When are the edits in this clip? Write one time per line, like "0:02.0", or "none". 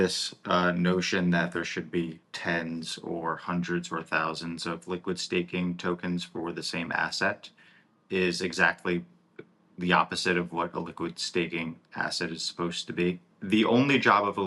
0:02.3
0:13.3

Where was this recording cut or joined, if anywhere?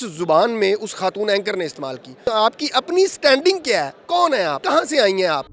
0:02.3
0:04.6

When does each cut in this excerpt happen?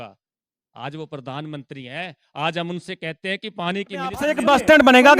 0:04.2

